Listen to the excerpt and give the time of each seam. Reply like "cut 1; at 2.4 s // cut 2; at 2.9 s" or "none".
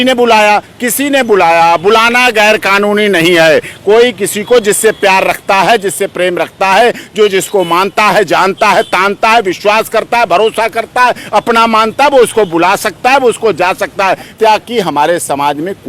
cut 1; at 14.3 s